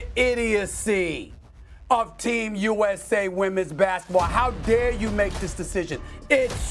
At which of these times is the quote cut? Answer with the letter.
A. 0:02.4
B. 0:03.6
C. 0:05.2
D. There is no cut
D